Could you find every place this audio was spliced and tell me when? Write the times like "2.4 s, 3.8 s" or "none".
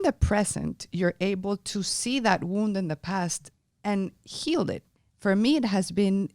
4.9 s